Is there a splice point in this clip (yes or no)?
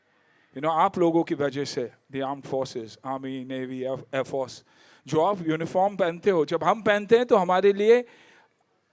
no